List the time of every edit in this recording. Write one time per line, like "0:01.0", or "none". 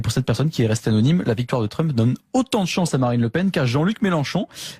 0:01.6